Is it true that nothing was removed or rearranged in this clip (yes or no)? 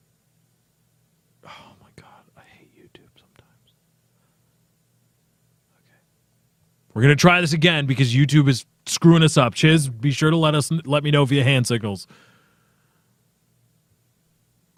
yes